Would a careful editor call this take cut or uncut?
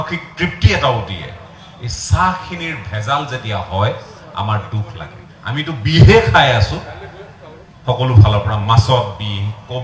cut